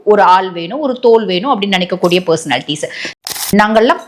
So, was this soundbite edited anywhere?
yes; 1 cut; at 3.0 s

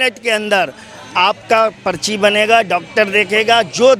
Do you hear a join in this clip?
no; 0 cuts

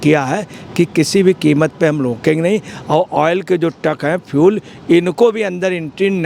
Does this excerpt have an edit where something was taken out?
no; 0 cuts

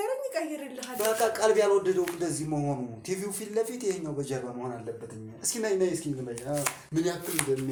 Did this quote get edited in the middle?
no; 0 cuts

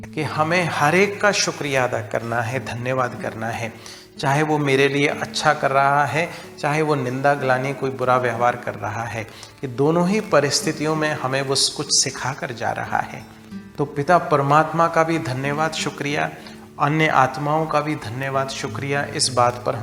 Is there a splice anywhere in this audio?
no; 0 cuts

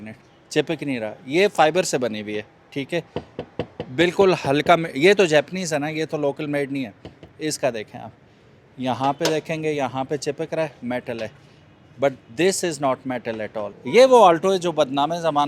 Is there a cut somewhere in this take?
yes; 1 cut; at 13.7 s

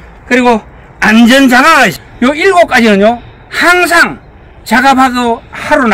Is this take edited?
yes; 1 cut; at 2.0 s

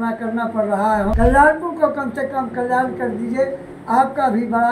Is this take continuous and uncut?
no; 1 cut; at 1.1 s

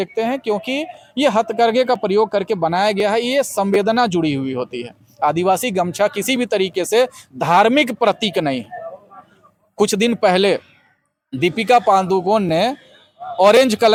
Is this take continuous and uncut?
yes; 0 cuts

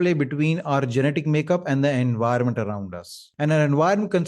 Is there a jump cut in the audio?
yes; 1 cut; at 3.2 s

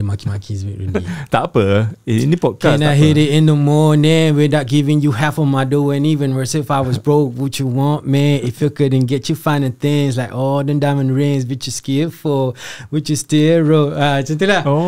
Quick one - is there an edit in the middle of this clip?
no; 0 cuts

